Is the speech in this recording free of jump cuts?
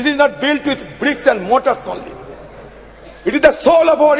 yes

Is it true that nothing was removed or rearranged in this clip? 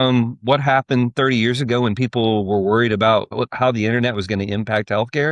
no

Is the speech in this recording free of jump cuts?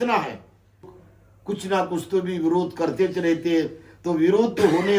no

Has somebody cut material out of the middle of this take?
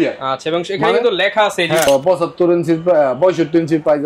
yes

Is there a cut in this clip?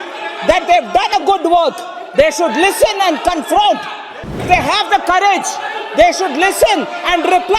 yes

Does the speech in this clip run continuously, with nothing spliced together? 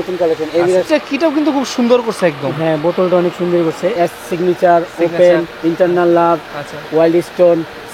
no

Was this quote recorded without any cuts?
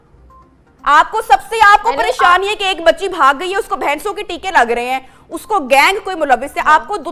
yes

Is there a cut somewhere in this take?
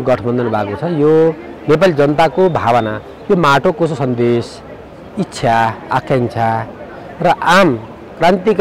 no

